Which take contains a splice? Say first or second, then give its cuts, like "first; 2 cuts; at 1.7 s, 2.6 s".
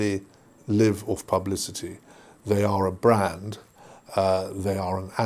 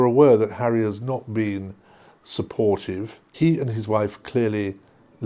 second; 1 cut; at 3.2 s